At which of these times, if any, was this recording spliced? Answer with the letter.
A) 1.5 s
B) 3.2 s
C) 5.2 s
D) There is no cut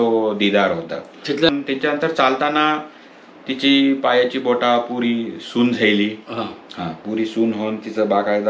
A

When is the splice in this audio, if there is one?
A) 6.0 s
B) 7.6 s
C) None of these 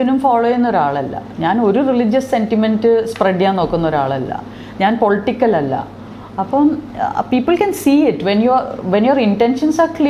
C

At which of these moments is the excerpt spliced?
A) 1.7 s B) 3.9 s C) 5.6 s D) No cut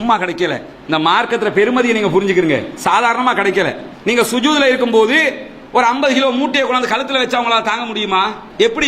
B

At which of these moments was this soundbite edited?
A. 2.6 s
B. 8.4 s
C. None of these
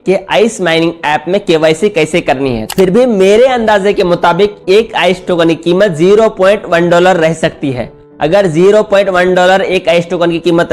A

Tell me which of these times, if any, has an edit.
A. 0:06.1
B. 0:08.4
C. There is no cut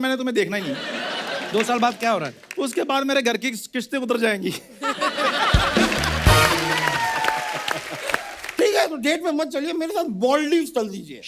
B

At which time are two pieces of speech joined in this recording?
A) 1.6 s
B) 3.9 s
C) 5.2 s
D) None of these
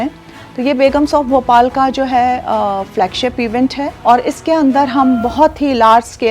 B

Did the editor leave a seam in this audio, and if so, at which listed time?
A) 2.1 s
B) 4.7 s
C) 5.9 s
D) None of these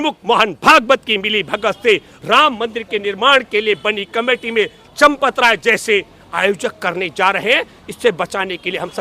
D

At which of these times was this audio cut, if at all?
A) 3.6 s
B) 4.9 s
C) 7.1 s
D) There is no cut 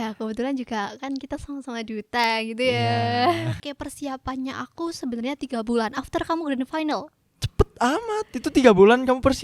A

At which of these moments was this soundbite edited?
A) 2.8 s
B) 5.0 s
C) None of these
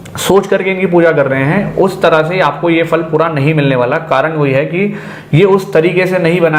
C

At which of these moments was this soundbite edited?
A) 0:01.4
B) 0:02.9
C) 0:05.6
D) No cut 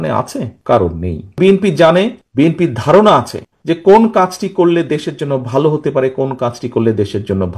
A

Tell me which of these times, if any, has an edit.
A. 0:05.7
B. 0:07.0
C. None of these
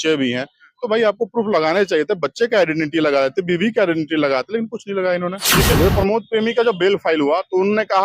A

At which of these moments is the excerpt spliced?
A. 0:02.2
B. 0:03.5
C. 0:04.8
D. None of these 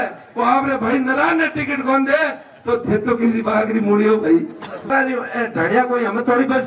C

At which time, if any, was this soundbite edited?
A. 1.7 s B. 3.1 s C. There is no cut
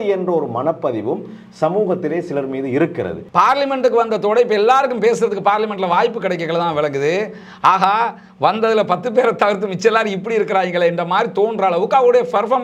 B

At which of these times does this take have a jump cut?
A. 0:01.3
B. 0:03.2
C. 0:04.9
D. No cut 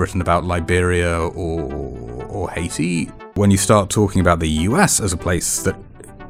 B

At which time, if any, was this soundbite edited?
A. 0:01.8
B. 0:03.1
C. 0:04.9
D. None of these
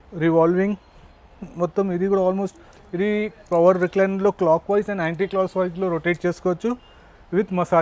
D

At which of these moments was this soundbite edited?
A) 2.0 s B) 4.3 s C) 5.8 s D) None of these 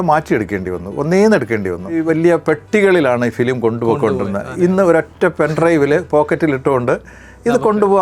A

